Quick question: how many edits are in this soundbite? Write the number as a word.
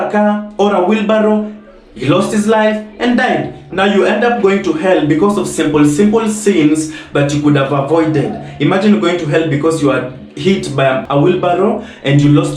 one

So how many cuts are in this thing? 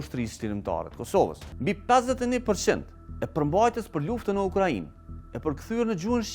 one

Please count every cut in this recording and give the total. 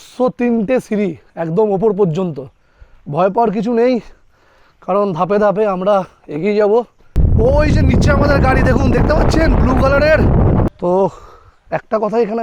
two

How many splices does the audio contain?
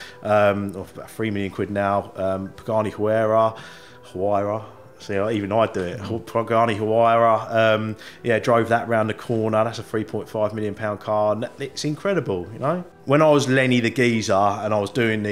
one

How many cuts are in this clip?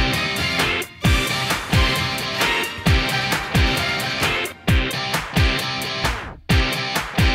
zero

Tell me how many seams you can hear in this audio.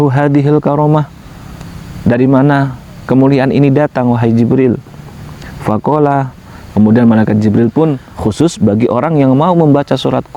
one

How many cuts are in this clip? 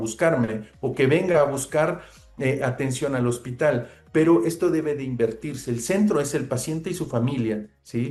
zero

